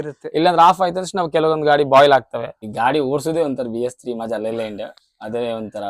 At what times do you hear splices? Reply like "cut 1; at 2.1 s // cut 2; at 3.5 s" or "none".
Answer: cut 1; at 2.5 s